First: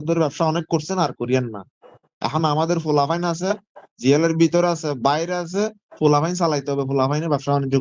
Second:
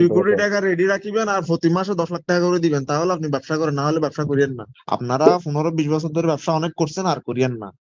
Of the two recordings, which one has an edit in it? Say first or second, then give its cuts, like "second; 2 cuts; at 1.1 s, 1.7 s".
second; 1 cut; at 4.7 s